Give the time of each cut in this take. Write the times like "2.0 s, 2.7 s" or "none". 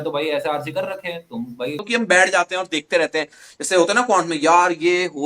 1.8 s